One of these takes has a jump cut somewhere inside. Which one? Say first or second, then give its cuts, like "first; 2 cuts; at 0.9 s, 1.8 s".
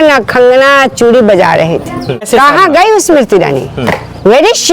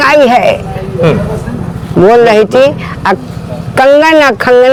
first; 1 cut; at 2.3 s